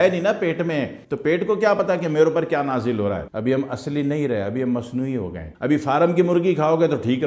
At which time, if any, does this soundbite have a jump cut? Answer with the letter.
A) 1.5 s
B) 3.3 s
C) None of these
B